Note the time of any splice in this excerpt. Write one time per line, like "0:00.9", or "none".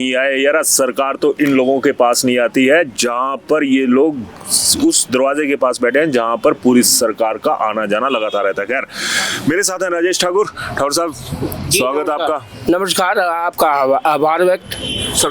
none